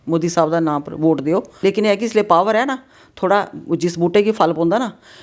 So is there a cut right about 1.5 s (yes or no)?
yes